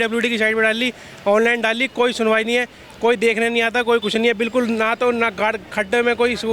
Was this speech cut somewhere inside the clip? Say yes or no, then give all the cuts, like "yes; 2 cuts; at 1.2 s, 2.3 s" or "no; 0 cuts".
no; 0 cuts